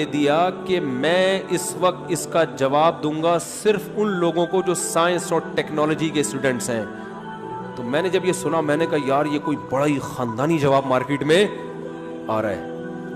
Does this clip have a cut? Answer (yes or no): no